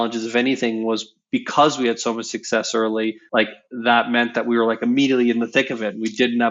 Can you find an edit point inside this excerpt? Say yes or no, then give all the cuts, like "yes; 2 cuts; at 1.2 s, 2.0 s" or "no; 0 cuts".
yes; 1 cut; at 3.2 s